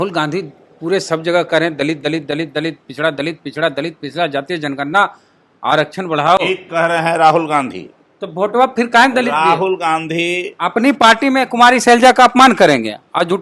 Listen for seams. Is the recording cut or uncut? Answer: uncut